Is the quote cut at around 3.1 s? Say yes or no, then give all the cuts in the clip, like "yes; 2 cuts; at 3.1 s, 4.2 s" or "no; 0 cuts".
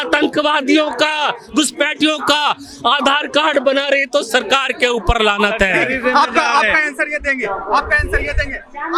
no; 0 cuts